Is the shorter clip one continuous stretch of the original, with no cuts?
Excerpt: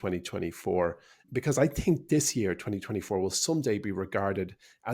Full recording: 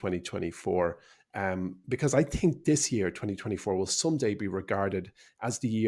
no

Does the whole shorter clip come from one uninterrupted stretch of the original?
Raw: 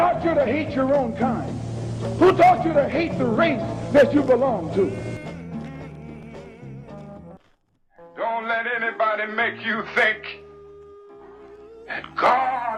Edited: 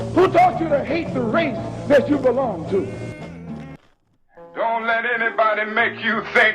no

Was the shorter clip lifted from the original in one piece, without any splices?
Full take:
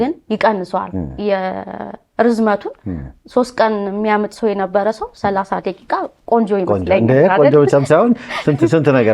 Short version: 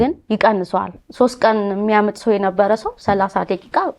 no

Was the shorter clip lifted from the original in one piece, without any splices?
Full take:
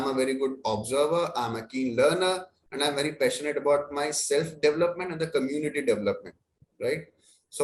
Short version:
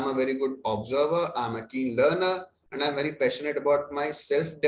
yes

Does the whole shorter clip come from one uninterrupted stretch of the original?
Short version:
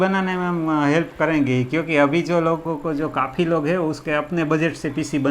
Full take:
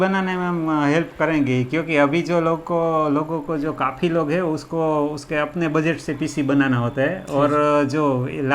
no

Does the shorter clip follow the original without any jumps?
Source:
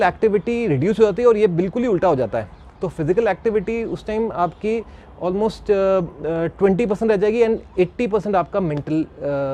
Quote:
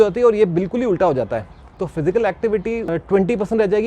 no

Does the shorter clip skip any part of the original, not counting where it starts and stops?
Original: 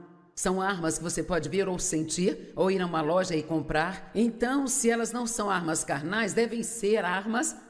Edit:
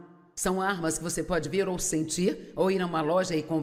no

